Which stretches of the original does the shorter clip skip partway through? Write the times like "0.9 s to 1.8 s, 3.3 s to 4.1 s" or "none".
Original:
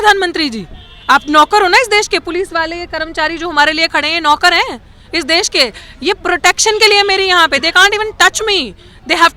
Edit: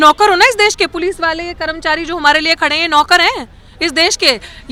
none